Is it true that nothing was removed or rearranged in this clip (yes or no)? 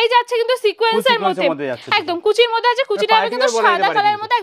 yes